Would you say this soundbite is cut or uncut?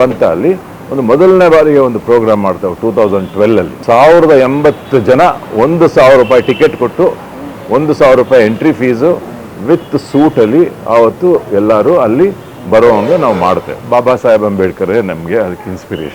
cut